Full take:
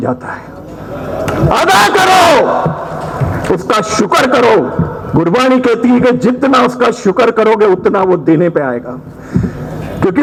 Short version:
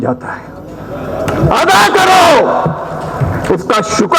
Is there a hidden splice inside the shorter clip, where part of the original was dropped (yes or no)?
no